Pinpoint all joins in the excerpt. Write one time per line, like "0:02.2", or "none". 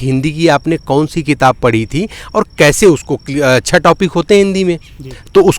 none